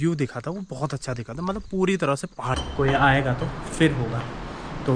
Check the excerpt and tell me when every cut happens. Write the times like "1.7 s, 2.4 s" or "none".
2.5 s